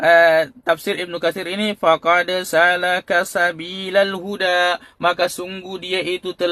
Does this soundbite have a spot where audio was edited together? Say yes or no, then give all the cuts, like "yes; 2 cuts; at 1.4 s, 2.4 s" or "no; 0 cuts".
no; 0 cuts